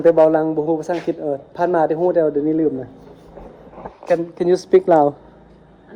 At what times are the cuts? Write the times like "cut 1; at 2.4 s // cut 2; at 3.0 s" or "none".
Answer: none